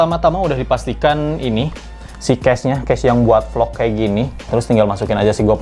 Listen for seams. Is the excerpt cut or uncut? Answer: cut